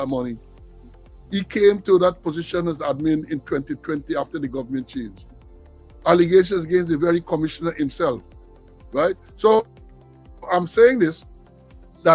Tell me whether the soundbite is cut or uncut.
uncut